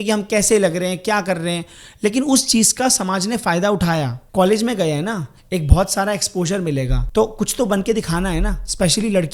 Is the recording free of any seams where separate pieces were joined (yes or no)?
no